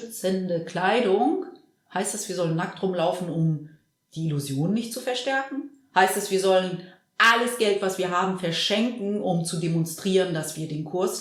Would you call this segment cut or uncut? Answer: uncut